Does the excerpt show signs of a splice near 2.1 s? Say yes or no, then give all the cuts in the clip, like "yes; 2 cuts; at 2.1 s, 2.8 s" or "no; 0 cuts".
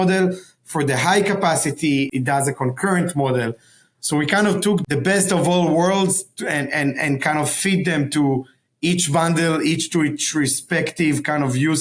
yes; 2 cuts; at 2.1 s, 4.8 s